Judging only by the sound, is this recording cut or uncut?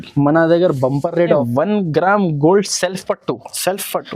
cut